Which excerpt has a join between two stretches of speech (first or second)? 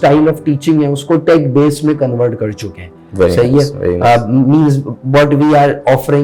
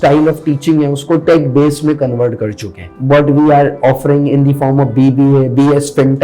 second